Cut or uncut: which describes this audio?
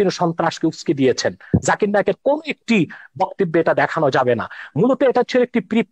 uncut